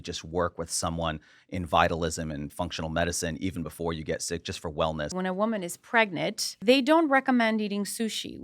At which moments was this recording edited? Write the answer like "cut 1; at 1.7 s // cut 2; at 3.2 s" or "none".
cut 1; at 5.1 s // cut 2; at 6.6 s